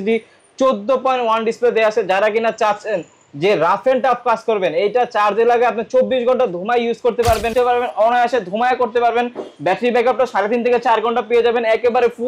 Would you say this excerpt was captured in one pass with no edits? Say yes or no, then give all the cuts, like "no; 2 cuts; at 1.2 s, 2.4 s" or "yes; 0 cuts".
no; 1 cut; at 7.5 s